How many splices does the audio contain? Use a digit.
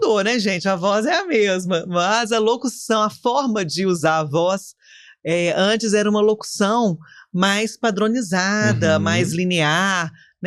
0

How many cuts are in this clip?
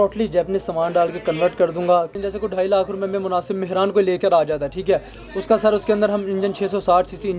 1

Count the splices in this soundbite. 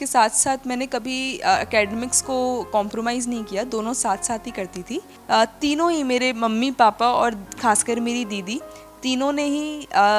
1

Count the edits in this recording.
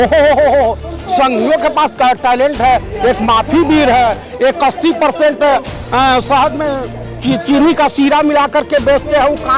0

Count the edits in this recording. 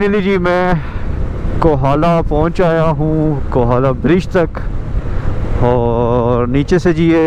0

